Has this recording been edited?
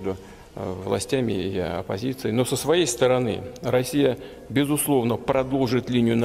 yes; 1 cut; at 2.9 s

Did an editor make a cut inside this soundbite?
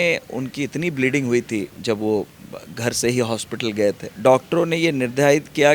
yes; 2 cuts; at 1.7 s, 4.1 s

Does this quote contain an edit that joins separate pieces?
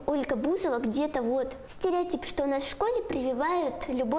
yes; 1 cut; at 1.6 s

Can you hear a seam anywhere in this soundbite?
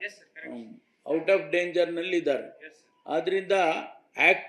no; 0 cuts

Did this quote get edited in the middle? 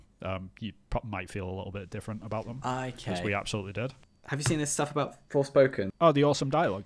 yes; 2 cuts; at 4.1 s, 5.9 s

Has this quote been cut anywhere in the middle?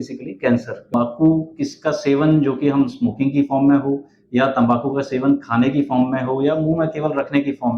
yes; 1 cut; at 0.9 s

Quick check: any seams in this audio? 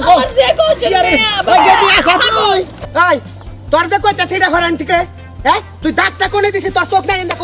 yes; 1 cut; at 2.8 s

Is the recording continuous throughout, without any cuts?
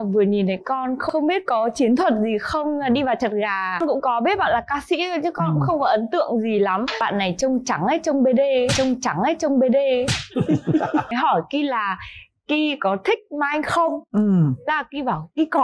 no; 3 cuts; at 3.8 s, 7.0 s, 11.1 s

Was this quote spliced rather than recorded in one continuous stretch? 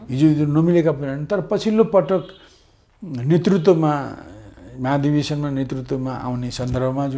no; 0 cuts

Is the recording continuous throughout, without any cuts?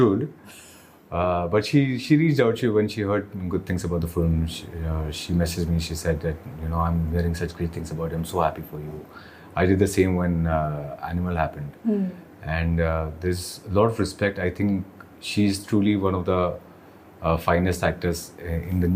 yes; 0 cuts

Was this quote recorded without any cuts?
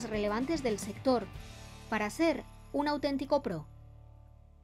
no; 1 cut; at 3.6 s

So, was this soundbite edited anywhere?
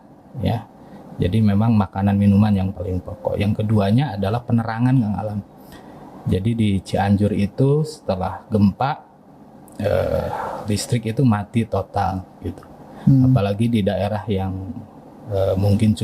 no; 0 cuts

